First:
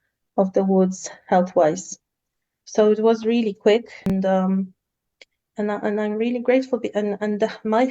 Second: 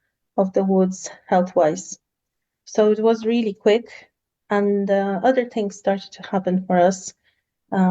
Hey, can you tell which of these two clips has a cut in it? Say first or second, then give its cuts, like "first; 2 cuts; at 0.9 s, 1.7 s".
first; 1 cut; at 4.1 s